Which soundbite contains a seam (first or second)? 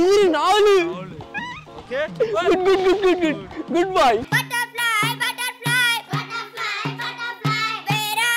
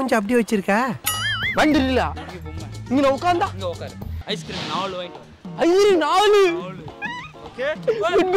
second